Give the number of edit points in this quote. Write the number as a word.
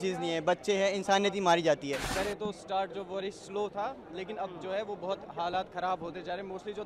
one